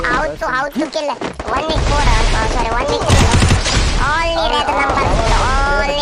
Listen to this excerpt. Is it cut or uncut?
uncut